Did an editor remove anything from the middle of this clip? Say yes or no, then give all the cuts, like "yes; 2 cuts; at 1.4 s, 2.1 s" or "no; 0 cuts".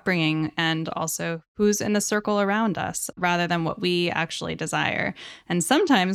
yes; 2 cuts; at 1.5 s, 3.1 s